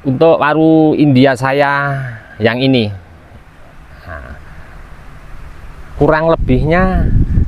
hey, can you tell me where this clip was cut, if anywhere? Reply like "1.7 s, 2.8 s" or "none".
5.9 s